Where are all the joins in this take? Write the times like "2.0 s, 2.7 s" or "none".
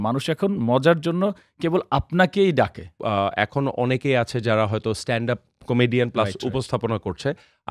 3.0 s